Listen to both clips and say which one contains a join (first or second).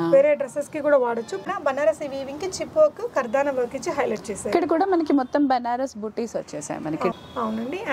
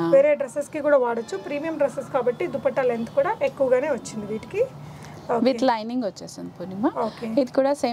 first